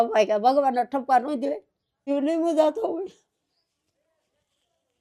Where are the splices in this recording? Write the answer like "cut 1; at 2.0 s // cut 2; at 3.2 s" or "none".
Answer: cut 1; at 2.1 s